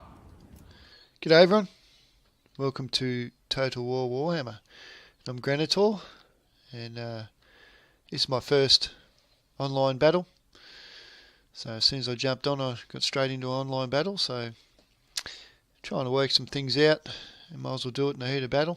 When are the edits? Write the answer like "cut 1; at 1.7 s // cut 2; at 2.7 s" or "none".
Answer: cut 1; at 15.0 s